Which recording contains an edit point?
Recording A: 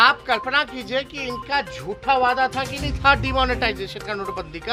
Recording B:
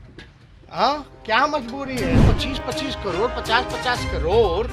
B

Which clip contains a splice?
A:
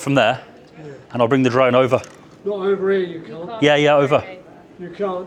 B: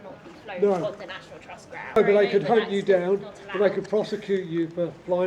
B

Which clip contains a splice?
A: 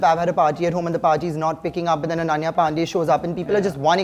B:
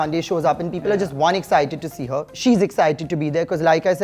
B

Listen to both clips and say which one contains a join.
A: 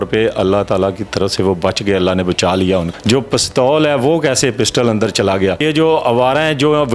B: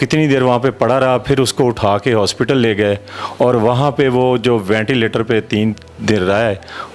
A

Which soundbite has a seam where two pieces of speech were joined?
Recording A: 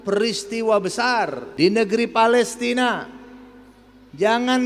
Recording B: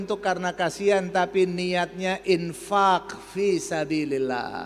A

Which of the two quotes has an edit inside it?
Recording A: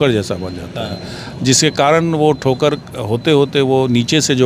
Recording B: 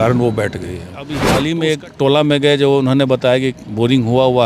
B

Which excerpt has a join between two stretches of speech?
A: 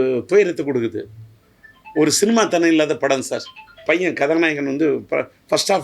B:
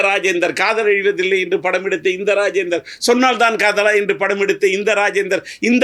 A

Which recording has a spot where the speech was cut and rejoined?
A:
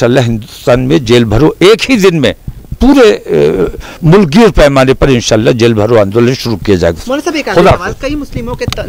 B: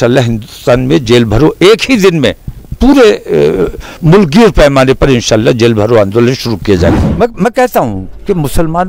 B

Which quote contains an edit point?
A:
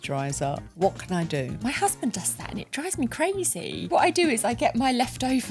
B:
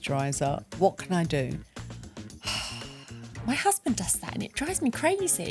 A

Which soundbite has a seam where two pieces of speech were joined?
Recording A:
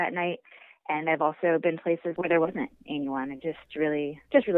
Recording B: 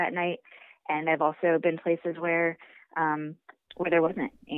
A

